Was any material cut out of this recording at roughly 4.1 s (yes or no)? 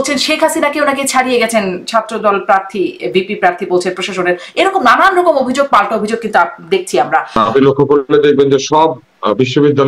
no